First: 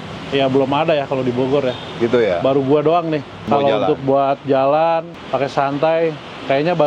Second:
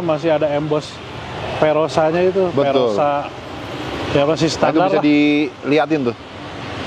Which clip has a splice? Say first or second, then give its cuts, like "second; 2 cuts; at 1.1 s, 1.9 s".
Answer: first; 2 cuts; at 3.5 s, 5.2 s